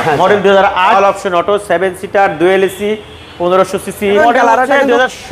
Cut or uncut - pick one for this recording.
cut